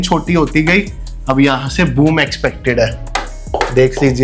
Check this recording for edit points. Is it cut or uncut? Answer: uncut